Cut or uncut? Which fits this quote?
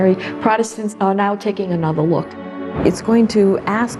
cut